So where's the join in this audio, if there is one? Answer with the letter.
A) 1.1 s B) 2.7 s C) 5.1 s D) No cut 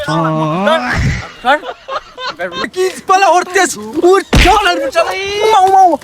B